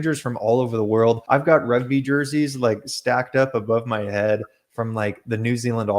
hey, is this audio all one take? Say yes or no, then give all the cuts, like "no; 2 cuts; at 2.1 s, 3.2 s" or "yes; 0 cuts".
no; 1 cut; at 1.2 s